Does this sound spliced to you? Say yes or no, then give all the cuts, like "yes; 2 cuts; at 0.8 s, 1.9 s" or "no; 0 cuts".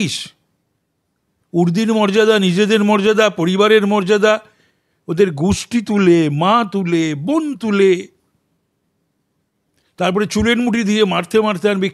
no; 0 cuts